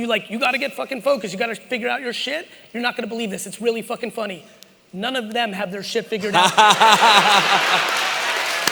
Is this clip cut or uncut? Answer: uncut